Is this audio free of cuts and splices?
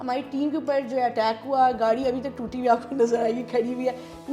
yes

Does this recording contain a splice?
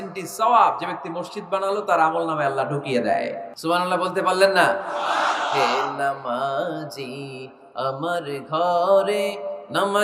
yes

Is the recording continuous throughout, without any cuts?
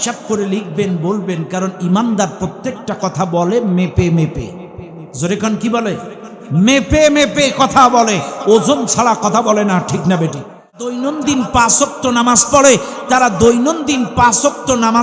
no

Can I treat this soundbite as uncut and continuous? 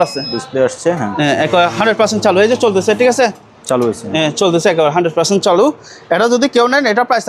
yes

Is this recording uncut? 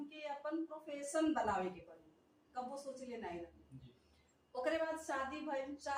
yes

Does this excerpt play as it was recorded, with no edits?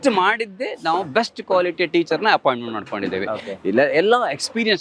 yes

